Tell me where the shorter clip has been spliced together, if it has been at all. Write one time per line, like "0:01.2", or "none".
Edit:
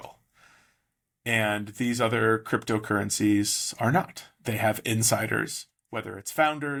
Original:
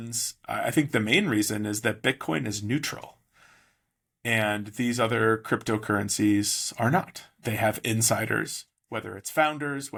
none